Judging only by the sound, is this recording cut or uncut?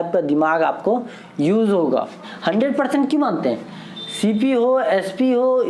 cut